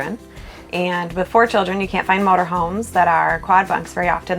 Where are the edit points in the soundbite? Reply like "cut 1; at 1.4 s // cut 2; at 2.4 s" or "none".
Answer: none

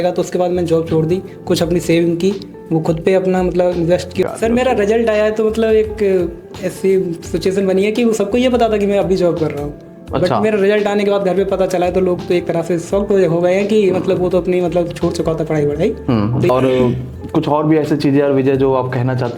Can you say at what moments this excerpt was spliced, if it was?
cut 1; at 4.2 s // cut 2; at 16.5 s

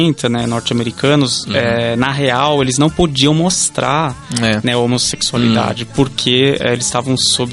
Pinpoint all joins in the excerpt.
none

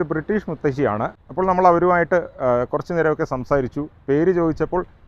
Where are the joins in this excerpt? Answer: cut 1; at 1.2 s

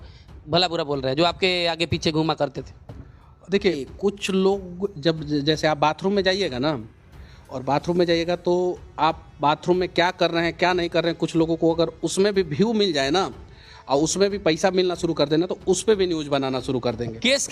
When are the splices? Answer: cut 1; at 3.9 s

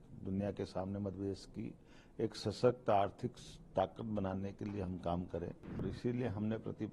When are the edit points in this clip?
cut 1; at 5.8 s

